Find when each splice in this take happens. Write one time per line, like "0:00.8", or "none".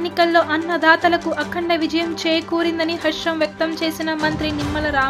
none